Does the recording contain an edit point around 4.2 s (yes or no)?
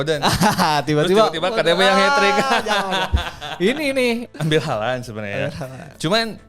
yes